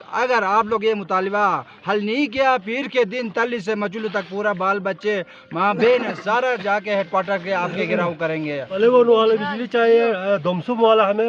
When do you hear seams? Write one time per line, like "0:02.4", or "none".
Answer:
0:08.8